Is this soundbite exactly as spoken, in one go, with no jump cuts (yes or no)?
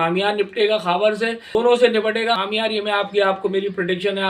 no